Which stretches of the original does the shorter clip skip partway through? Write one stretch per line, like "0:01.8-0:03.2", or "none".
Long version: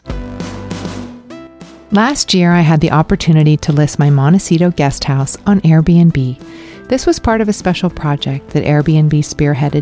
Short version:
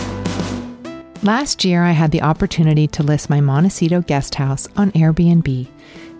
0:01.5-0:01.8

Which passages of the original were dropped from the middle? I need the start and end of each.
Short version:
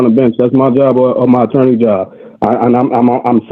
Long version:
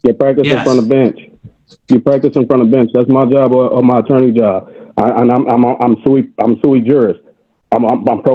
none

